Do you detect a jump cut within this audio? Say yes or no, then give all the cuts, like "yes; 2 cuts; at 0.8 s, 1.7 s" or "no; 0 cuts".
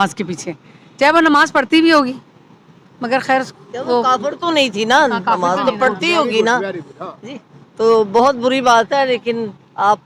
no; 0 cuts